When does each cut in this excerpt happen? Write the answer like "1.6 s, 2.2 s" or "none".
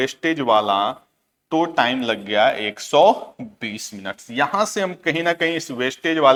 none